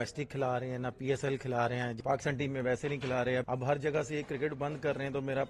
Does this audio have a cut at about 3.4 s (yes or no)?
yes